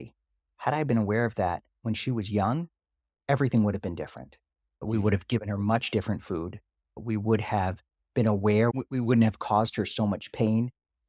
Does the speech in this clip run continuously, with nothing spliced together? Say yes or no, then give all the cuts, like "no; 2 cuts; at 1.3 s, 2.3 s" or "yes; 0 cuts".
no; 3 cuts; at 4.8 s, 7.0 s, 8.7 s